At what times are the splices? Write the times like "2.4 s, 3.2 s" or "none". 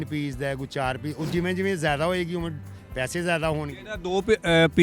none